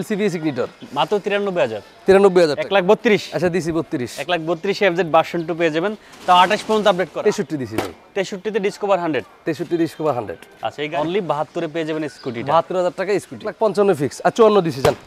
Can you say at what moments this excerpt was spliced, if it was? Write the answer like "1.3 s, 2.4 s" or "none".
3.0 s, 7.1 s, 10.6 s, 13.6 s